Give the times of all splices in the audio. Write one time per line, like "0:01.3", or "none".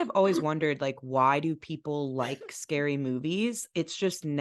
none